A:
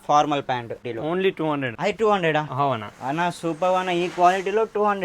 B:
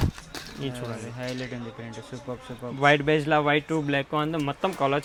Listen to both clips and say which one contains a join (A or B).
A